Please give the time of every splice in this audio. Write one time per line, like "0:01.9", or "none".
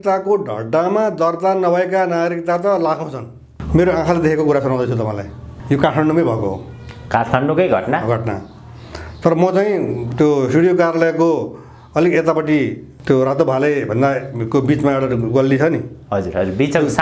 0:03.5
0:10.0
0:12.9